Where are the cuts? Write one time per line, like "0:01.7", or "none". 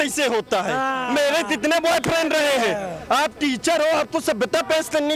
none